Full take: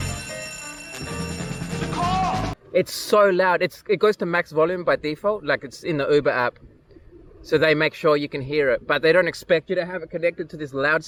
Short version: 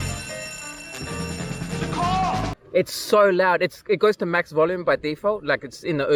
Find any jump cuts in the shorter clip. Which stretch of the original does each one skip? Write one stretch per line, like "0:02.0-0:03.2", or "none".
none